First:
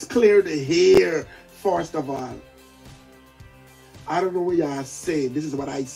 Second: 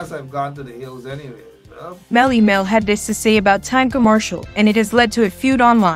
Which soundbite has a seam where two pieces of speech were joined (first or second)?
second